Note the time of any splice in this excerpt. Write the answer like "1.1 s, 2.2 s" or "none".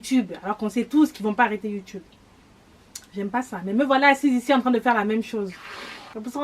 none